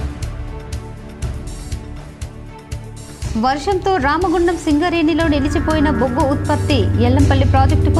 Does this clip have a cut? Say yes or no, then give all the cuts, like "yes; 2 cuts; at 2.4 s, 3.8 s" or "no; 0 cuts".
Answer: yes; 1 cut; at 2.9 s